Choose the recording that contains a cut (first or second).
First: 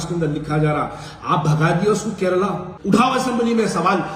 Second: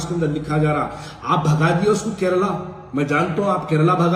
first